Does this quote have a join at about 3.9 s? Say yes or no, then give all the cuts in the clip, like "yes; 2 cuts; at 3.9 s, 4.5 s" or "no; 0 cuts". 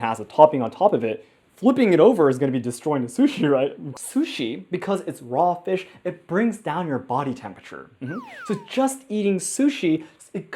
yes; 1 cut; at 3.9 s